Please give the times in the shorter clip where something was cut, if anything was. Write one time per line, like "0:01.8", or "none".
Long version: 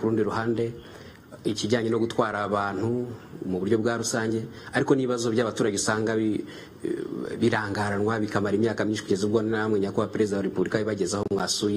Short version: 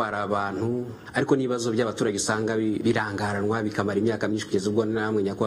0:01.0
0:02.8